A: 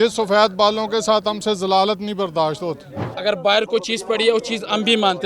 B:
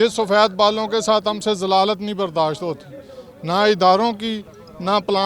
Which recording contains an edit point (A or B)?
A